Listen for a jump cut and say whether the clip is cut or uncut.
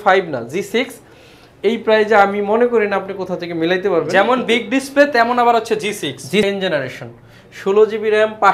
cut